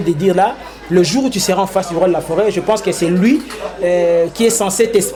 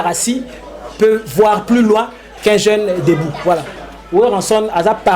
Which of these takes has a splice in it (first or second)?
second